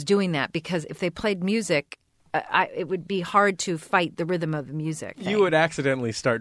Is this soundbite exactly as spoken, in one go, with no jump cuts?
no; 2 cuts; at 2.1 s, 5.2 s

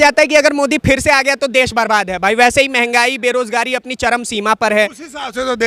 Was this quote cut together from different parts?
no; 0 cuts

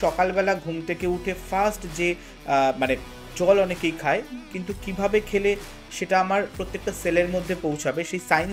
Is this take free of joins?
yes; 0 cuts

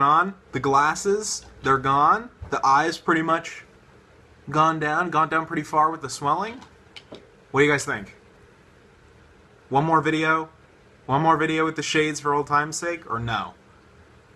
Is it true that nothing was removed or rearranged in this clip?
yes; 0 cuts

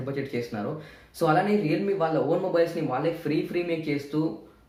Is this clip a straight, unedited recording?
yes; 0 cuts

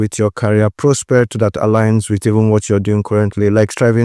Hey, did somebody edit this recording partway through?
no; 0 cuts

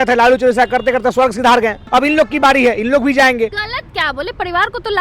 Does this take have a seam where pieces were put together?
yes; 2 cuts; at 1.8 s, 3.6 s

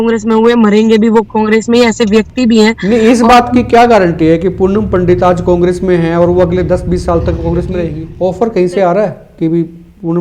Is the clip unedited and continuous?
no; 1 cut; at 8.0 s

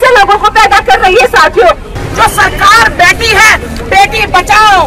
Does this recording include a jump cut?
yes; 1 cut; at 2.0 s

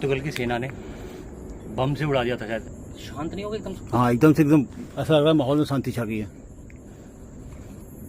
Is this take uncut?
no; 1 cut; at 2.6 s

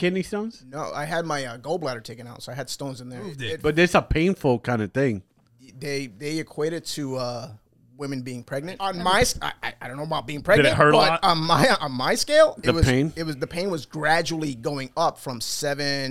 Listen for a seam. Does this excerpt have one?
yes; 2 cuts; at 3.5 s, 8.7 s

